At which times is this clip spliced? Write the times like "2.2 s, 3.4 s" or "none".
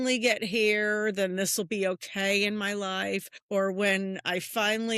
3.3 s